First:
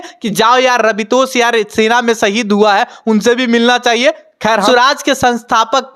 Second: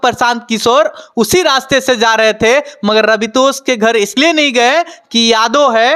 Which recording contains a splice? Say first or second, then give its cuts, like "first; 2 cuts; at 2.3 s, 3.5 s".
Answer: first; 1 cut; at 4.7 s